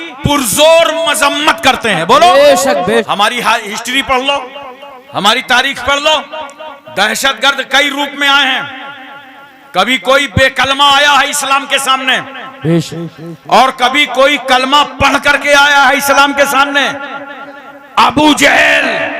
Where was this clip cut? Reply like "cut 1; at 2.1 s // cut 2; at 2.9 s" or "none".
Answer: cut 1; at 3.0 s

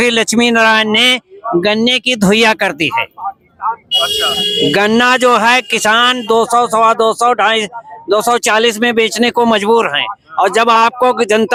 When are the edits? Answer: none

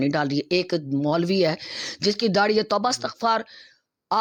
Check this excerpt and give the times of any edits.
none

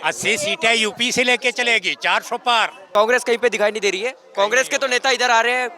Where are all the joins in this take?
cut 1; at 2.9 s

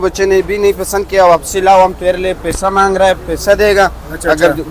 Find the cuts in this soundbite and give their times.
none

